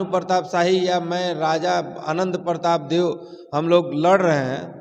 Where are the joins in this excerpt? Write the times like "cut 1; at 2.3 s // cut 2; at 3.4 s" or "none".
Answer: none